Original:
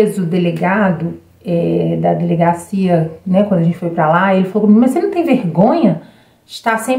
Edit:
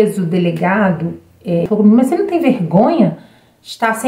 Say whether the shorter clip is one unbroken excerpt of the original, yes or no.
no